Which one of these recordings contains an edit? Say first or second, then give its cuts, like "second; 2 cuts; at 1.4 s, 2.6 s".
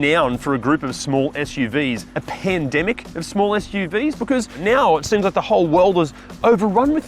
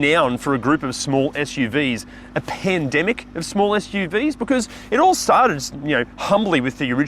first; 2 cuts; at 2.1 s, 4.6 s